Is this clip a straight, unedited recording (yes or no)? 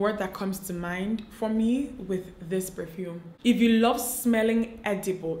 no